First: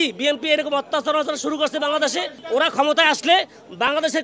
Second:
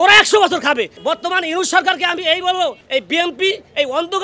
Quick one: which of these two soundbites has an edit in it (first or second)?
second